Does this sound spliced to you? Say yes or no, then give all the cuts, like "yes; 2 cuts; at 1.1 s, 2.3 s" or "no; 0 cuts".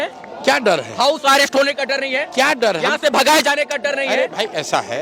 no; 0 cuts